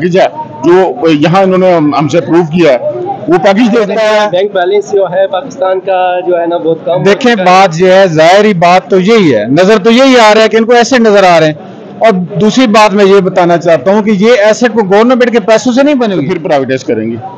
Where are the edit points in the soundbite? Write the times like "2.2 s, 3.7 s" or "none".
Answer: 3.9 s, 16.2 s

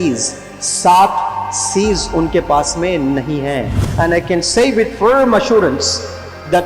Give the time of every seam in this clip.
3.8 s

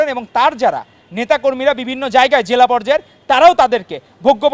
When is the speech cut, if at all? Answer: none

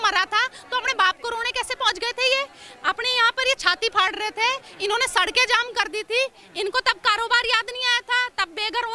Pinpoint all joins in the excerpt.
none

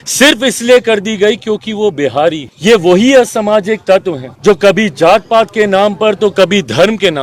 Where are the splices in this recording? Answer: 2.5 s, 4.2 s

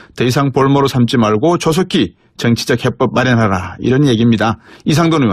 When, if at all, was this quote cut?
none

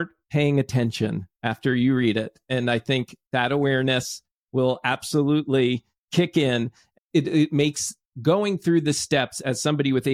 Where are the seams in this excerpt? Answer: 6.8 s

